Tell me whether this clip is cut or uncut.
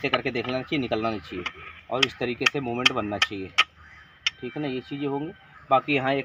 uncut